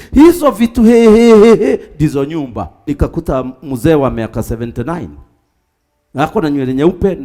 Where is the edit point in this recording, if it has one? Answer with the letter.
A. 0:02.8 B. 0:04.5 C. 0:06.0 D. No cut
A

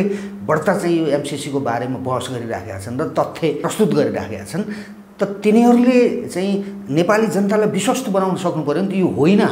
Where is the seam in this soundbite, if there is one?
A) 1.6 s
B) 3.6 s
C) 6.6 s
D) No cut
B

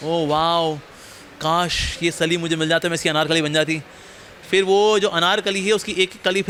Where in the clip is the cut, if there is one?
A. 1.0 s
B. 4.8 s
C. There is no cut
C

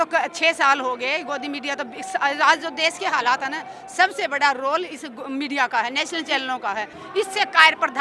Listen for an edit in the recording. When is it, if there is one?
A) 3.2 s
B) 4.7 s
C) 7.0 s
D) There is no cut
C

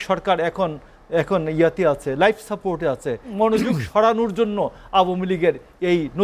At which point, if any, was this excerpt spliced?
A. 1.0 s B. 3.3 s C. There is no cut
B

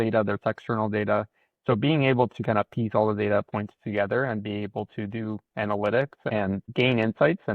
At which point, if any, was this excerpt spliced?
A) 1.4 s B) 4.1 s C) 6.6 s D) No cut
C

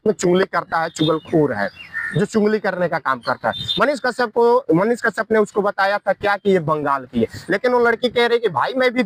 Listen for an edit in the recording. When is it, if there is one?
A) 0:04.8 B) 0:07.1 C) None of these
C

